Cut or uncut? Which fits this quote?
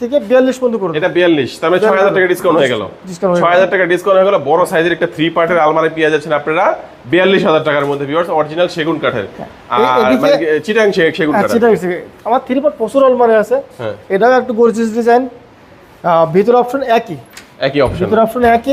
uncut